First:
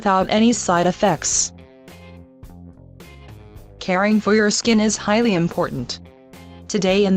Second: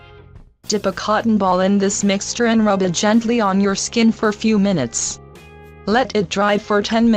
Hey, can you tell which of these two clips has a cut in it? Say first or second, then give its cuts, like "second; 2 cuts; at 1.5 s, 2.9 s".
first; 1 cut; at 4.6 s